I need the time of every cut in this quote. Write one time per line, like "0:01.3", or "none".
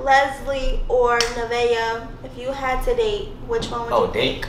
none